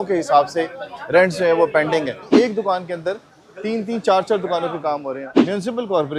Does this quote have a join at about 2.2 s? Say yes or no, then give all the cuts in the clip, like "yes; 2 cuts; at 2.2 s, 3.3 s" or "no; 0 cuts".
yes; 2 cuts; at 2.2 s, 5.3 s